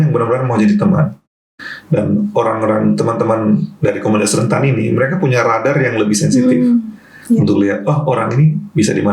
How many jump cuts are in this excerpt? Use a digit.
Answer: 1